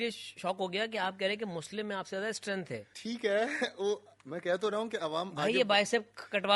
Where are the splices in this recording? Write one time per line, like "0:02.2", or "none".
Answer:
0:02.9

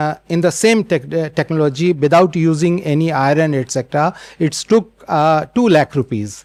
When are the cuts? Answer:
none

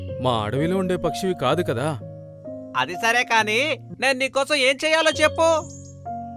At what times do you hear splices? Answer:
0:03.9

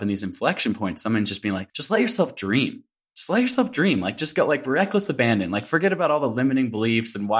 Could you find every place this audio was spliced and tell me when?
0:01.7

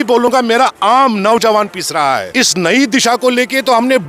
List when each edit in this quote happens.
0:02.3

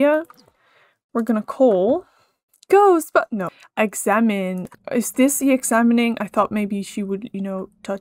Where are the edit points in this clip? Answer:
0:03.6
0:04.7

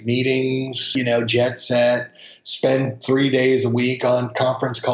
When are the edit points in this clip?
0:00.9

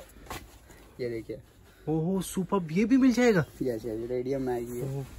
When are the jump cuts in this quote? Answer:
none

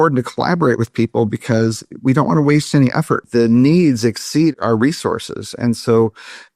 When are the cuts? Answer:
0:03.2
0:04.5

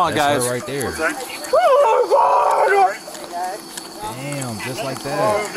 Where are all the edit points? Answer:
none

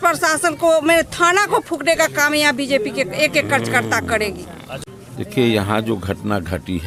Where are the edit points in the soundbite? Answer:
none

